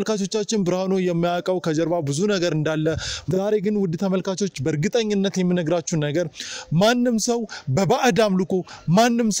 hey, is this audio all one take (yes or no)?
no